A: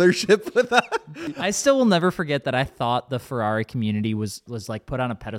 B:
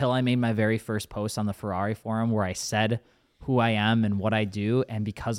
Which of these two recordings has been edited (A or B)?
A